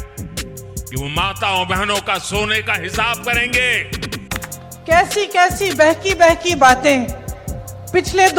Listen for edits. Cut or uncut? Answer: cut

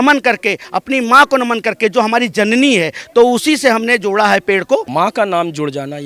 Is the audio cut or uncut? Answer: cut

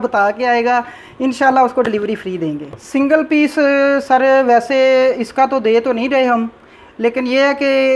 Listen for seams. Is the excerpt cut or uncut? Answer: cut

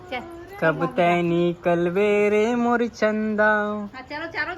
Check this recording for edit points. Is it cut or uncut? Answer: uncut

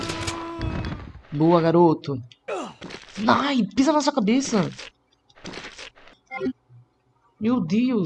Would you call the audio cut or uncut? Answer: cut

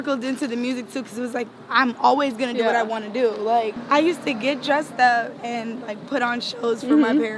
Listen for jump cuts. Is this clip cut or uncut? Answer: cut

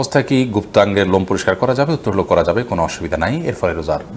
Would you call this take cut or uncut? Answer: uncut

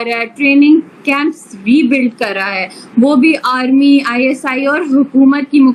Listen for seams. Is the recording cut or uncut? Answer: uncut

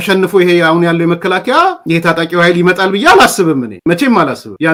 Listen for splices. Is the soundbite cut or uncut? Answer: uncut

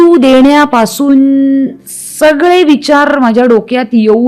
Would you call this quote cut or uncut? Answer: uncut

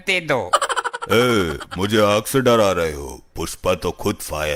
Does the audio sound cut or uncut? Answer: uncut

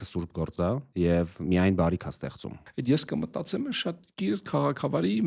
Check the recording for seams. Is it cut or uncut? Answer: cut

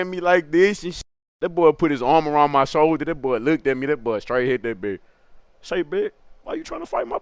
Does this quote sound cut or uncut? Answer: cut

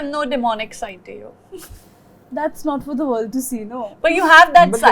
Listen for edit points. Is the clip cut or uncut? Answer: uncut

